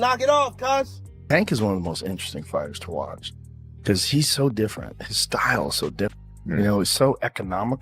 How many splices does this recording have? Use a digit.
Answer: 2